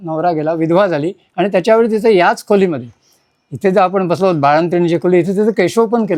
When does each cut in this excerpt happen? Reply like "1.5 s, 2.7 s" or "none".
none